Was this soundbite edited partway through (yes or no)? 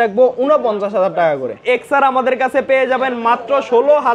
yes